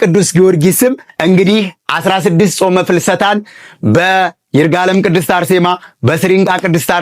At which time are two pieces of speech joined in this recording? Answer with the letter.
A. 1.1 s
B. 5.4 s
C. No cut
A